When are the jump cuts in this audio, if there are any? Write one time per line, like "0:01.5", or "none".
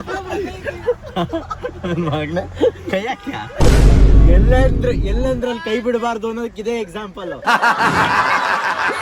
none